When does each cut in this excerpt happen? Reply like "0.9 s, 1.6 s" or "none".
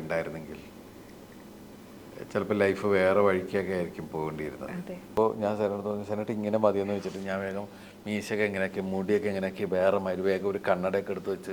5.1 s